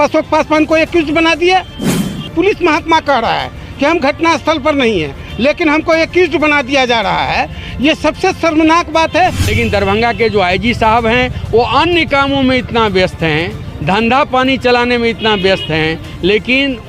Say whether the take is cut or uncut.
cut